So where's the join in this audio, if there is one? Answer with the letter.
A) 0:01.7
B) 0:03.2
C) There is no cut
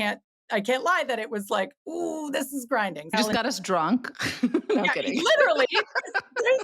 B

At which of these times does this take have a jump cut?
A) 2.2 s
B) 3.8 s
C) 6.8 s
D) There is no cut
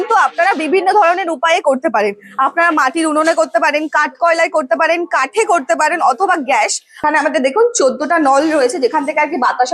C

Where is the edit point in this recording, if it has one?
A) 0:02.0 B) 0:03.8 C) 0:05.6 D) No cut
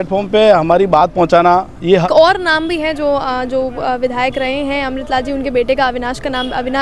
A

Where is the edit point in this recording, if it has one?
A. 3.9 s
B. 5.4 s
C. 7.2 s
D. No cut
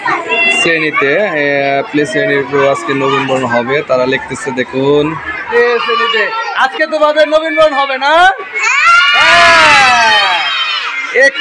B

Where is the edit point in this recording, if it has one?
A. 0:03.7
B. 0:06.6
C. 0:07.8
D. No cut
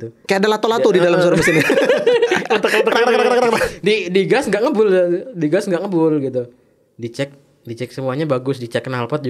D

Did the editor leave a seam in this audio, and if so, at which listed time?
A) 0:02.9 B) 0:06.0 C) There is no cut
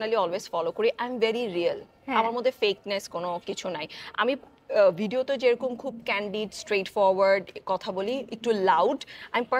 C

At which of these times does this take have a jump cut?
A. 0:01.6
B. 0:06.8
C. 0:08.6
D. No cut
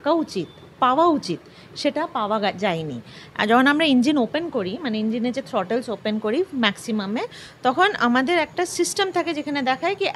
D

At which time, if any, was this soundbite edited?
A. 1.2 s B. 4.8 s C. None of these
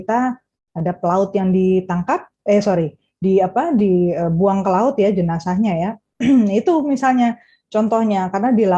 C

